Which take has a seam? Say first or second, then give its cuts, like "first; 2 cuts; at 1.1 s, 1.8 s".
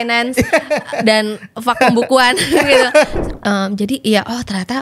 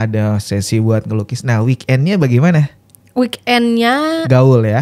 first; 1 cut; at 3.2 s